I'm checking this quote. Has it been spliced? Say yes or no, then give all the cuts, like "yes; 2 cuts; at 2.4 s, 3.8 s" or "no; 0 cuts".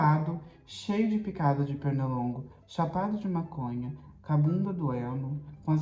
no; 0 cuts